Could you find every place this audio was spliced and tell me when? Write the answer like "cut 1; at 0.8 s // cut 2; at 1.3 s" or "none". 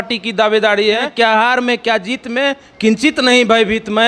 cut 1; at 1.1 s